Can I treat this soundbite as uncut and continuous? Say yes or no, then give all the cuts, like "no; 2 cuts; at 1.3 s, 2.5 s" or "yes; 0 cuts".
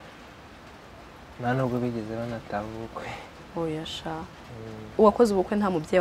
no; 1 cut; at 4.9 s